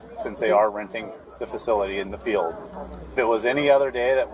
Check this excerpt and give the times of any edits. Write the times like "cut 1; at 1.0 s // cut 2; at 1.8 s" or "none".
cut 1; at 1.9 s // cut 2; at 3.1 s